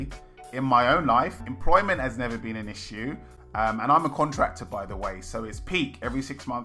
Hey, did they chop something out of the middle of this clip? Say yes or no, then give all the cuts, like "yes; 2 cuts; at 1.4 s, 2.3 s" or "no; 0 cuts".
yes; 1 cut; at 1.4 s